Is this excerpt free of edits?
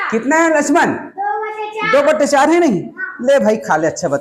yes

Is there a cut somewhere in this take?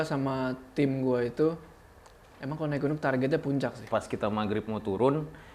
yes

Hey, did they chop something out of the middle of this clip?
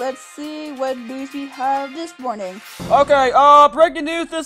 yes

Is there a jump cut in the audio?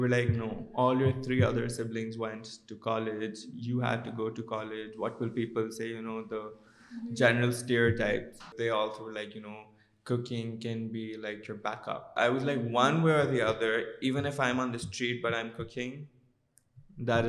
yes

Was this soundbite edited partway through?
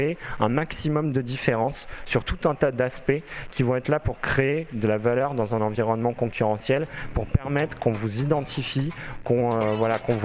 no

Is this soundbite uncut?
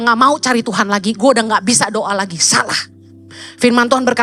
yes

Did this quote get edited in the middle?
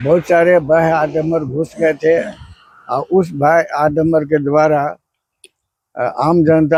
no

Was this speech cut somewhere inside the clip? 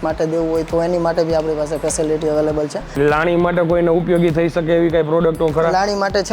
yes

